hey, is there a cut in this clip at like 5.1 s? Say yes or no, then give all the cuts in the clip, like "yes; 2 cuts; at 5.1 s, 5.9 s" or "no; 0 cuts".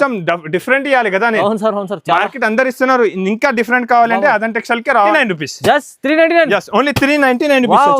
yes; 1 cut; at 5.1 s